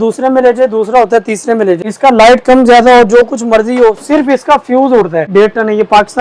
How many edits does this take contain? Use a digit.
2